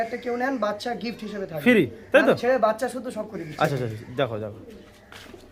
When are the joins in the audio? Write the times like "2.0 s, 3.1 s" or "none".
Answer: none